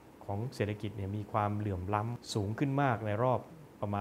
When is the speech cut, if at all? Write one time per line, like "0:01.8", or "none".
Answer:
0:02.2